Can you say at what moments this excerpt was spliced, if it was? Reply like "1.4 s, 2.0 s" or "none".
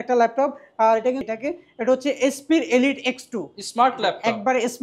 1.2 s